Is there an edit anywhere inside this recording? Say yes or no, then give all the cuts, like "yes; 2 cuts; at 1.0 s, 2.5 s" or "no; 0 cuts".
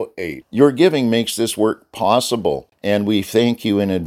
yes; 1 cut; at 2.7 s